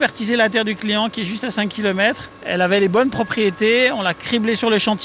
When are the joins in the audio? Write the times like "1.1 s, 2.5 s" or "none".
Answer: 2.3 s

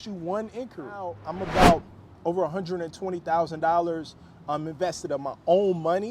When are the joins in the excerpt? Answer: 1.2 s

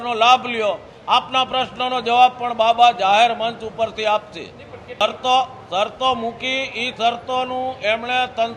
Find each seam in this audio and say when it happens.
none

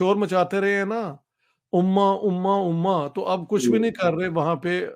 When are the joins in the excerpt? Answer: none

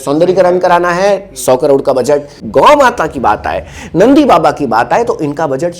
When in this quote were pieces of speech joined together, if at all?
2.4 s

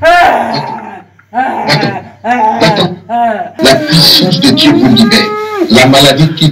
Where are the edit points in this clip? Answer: 3.5 s

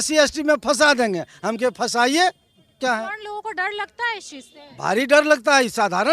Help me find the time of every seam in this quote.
2.8 s

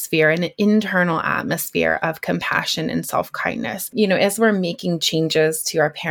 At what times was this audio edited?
3.9 s

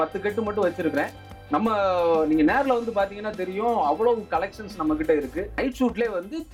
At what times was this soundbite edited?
5.6 s

